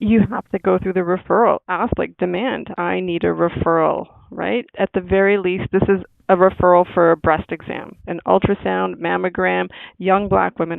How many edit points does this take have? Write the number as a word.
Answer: three